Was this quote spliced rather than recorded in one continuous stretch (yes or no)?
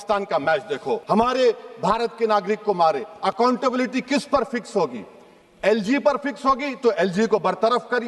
yes